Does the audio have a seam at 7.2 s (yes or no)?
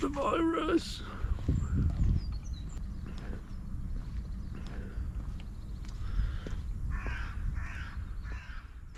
no